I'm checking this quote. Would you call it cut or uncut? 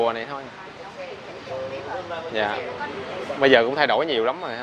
uncut